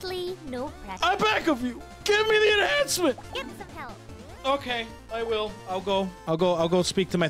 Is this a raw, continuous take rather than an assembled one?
no; 3 cuts; at 0.9 s, 3.2 s, 6.2 s

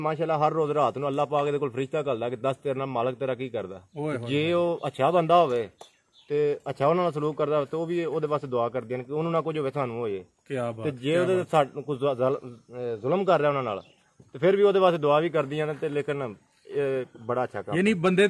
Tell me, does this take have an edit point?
no; 0 cuts

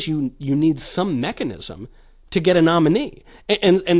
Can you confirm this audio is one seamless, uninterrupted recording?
yes; 0 cuts

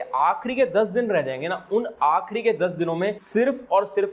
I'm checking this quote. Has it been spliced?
yes; 1 cut; at 3.2 s

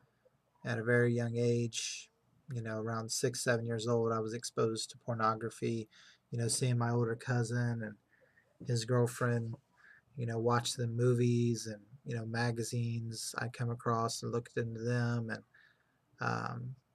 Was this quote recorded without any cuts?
no; 1 cut; at 13.1 s

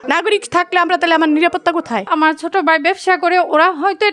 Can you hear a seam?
yes; 1 cut; at 2.1 s

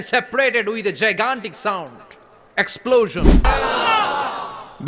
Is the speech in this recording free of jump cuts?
no; 1 cut; at 3.5 s

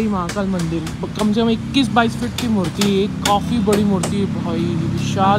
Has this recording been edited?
no; 0 cuts

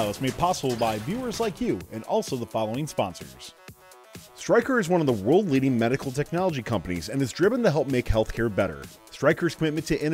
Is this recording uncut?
no; 1 cut; at 3.7 s

